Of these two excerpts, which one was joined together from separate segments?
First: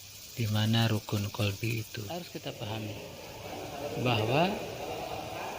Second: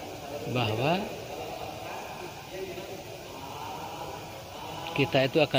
first; 1 cut; at 2.1 s

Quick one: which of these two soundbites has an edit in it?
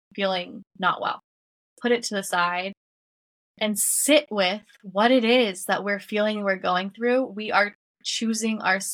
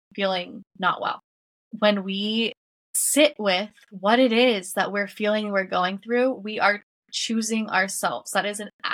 second; 2 cuts; at 1.7 s, 2.9 s

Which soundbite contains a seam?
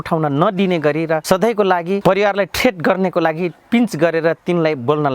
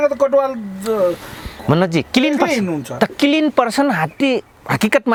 first; 2 cuts; at 1.2 s, 2.0 s

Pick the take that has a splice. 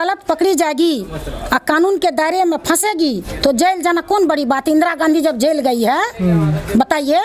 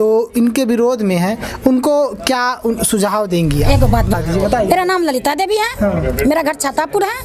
second; 1 cut; at 4.2 s

